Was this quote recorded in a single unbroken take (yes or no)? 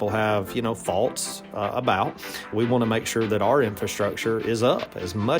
no